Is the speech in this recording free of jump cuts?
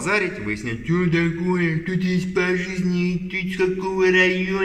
yes; 0 cuts

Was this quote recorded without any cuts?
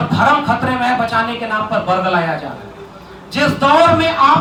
yes; 0 cuts

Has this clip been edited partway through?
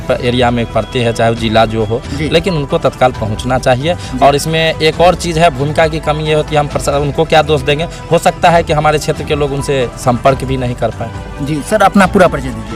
no; 0 cuts

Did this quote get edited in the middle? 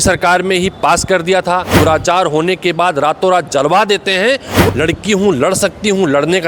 yes; 2 cuts; at 1.7 s, 4.7 s

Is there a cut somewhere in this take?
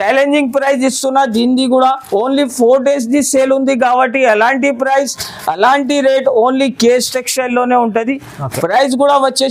no; 0 cuts

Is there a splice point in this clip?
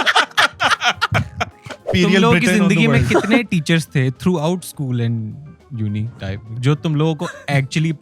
yes; 2 cuts; at 1.9 s, 6.6 s

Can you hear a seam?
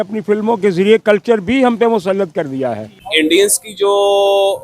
yes; 1 cut; at 3.0 s

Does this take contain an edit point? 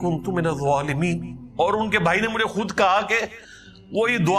yes; 1 cut; at 1.4 s

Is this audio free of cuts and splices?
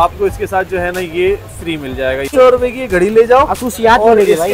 no; 1 cut; at 2.3 s

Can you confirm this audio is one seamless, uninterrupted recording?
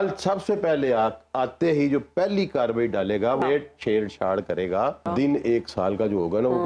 no; 1 cut; at 5.0 s

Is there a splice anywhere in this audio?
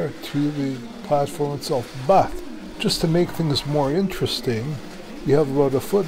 no; 0 cuts

